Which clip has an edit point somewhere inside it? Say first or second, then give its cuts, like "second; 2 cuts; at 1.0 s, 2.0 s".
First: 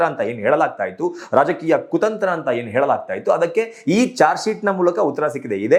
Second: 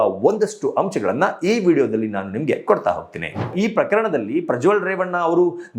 second; 1 cut; at 3.5 s